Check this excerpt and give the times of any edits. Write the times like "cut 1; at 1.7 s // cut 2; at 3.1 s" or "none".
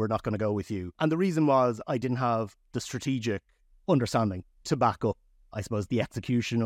cut 1; at 0.9 s // cut 2; at 3.7 s // cut 3; at 5.4 s